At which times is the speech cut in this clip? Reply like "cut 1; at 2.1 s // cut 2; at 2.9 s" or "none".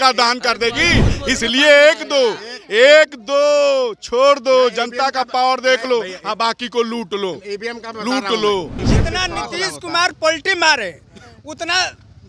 cut 1; at 8.8 s